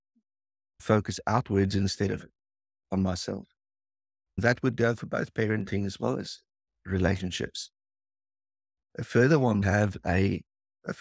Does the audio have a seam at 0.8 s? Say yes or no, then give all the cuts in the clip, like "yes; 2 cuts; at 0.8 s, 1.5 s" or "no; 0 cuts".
yes; 3 cuts; at 0.8 s, 4.4 s, 9.6 s